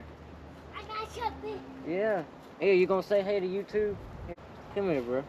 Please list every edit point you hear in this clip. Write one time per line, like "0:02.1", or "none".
0:04.4